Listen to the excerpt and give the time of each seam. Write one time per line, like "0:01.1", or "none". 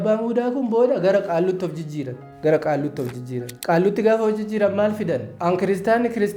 0:02.2
0:03.5
0:05.3